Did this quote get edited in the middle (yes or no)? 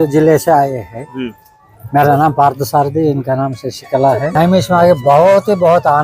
yes